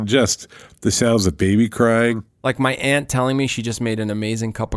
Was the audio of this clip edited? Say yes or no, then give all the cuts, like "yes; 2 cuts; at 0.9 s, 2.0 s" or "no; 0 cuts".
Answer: yes; 1 cut; at 2.3 s